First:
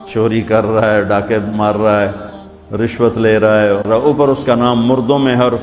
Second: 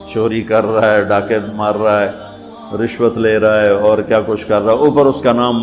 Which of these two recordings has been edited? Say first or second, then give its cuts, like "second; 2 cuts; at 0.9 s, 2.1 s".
first; 1 cut; at 3.9 s